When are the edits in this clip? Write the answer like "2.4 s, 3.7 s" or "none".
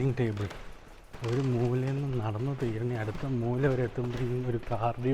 1.1 s